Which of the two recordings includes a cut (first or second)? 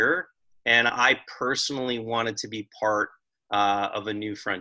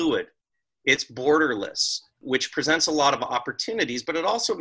second